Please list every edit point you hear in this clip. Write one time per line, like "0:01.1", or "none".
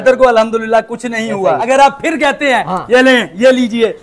0:01.6

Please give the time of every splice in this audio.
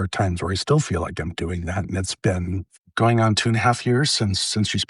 0:02.8

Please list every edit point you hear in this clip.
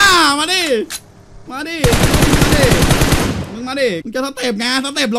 0:04.0

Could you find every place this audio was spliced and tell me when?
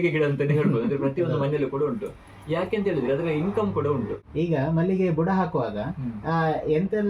0:04.2

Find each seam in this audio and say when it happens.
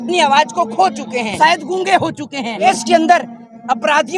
0:01.3
0:02.6

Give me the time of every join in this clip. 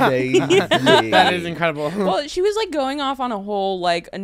none

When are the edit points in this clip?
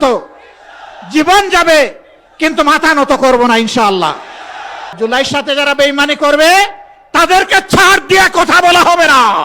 0:04.9

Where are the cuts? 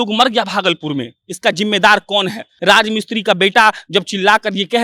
0:02.5

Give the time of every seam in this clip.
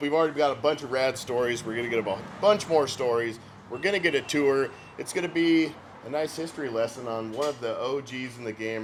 none

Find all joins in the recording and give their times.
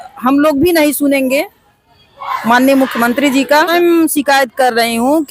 0:03.7

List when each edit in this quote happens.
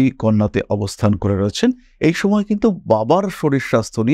none

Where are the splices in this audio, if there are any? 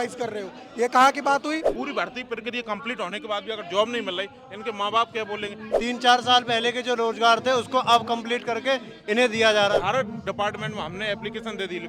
0:01.7
0:05.6
0:09.7

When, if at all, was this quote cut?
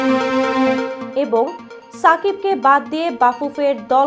none

